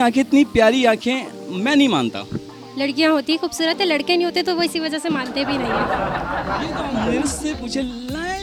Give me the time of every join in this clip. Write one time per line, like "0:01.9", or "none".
none